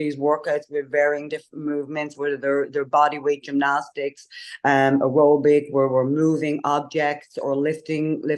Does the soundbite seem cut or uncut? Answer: uncut